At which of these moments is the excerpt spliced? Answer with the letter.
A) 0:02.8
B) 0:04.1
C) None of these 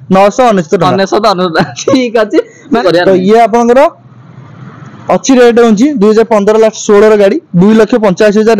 A